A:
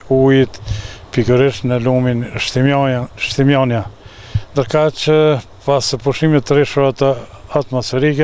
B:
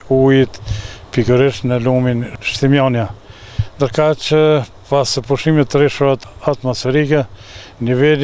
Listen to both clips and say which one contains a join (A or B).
B